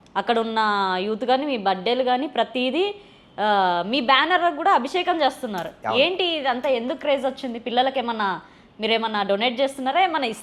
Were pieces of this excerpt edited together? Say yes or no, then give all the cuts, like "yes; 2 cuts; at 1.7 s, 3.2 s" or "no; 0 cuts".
no; 0 cuts